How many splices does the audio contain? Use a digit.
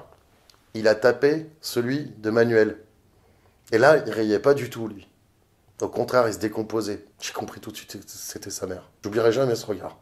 2